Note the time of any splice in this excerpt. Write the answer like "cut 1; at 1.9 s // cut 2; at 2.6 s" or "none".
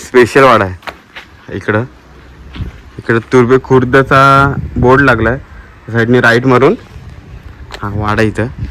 none

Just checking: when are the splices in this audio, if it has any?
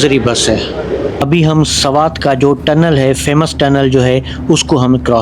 cut 1; at 1.2 s

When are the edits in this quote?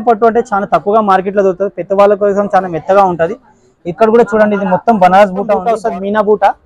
cut 1; at 5.7 s

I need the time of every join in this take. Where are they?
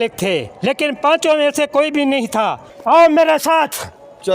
cut 1; at 2.7 s

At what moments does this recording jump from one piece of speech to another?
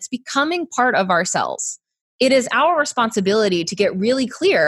cut 1; at 2.0 s

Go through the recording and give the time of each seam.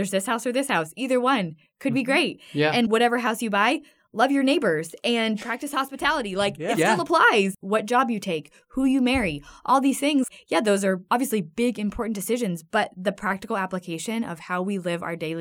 cut 1; at 2.9 s // cut 2; at 7.6 s // cut 3; at 10.7 s

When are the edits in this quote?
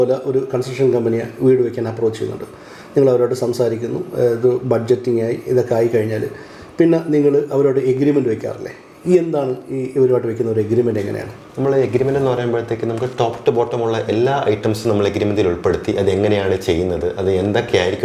none

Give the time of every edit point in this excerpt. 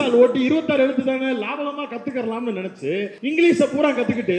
cut 1; at 3.1 s

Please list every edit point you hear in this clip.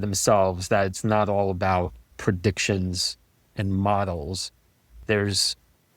cut 1; at 2.0 s

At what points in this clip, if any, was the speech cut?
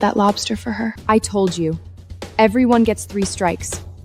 cut 1; at 1.0 s

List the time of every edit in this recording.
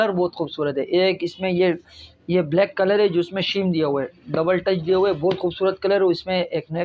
none

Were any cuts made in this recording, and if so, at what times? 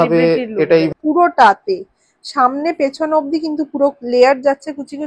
cut 1; at 0.9 s

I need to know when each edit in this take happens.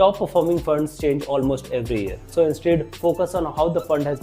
cut 1; at 2.2 s

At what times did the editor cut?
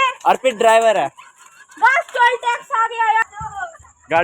cut 1; at 3.2 s

